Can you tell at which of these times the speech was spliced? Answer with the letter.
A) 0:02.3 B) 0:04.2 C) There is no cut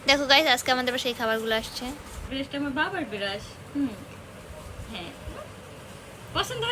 A